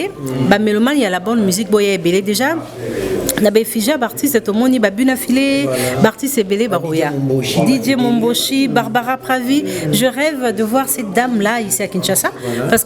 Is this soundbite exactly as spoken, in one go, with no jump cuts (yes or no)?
yes